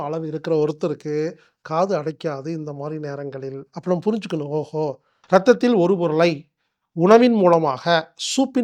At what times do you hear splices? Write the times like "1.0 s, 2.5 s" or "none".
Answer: 5.1 s